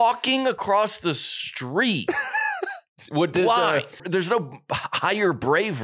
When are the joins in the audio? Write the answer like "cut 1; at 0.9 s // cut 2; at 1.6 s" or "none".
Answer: cut 1; at 4.0 s